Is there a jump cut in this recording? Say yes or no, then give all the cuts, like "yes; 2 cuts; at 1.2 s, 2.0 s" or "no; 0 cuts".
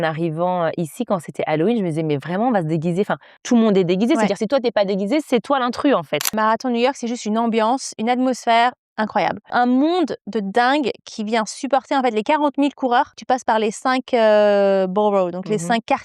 yes; 4 cuts; at 3.4 s, 6.3 s, 9.5 s, 13.2 s